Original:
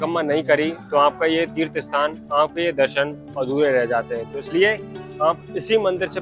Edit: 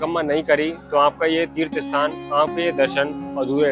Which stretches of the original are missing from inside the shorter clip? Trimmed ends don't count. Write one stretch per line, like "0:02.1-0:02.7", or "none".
none

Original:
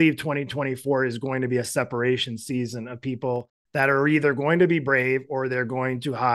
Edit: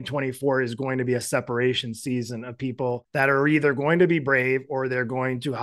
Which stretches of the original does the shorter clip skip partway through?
0:03.5-0:03.6

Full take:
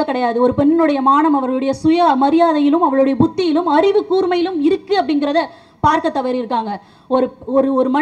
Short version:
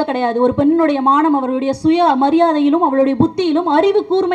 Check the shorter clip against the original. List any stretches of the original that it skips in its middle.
none

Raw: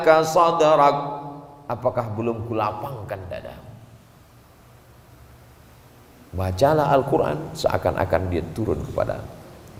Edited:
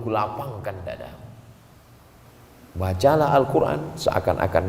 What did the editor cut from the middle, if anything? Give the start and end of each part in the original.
0:04.7-0:05.8

